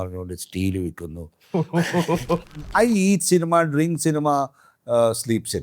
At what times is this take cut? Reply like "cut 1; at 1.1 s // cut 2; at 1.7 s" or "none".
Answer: cut 1; at 2.4 s